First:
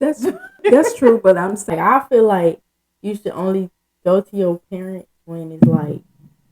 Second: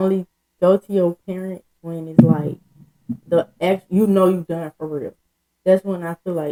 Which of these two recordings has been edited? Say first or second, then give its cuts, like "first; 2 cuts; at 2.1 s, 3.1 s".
first; 1 cut; at 1.7 s